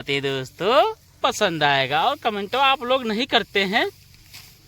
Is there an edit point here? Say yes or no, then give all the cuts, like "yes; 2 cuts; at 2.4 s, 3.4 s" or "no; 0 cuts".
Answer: yes; 1 cut; at 1.2 s